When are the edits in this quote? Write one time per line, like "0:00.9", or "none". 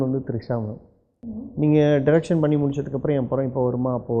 0:01.3